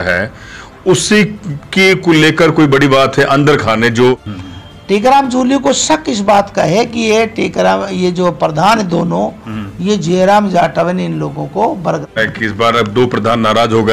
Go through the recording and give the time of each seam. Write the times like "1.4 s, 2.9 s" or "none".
4.3 s, 12.1 s